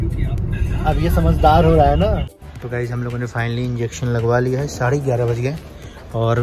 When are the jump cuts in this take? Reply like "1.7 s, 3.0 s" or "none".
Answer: 2.4 s